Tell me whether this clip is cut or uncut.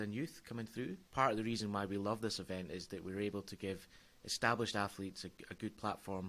cut